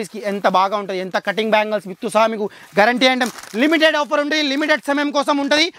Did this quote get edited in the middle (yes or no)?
no